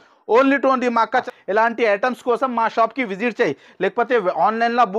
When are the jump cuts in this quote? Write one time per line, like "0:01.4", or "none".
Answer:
0:01.3